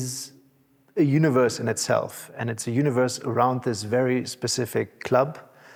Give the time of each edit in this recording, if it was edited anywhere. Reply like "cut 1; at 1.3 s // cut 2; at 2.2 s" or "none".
none